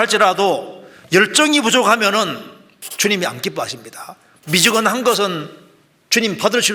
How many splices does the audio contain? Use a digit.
0